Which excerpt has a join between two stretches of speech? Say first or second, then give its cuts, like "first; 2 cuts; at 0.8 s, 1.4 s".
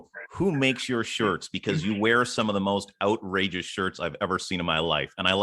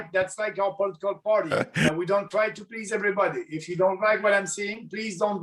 second; 1 cut; at 1.9 s